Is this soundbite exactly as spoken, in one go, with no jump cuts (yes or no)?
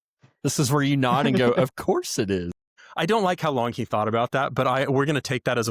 yes